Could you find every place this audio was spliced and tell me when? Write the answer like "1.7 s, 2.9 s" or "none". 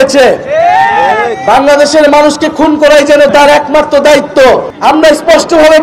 4.7 s